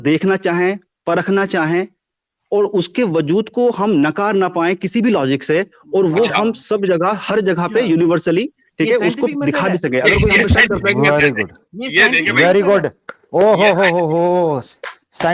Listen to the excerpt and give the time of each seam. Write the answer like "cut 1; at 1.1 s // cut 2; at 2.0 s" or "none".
none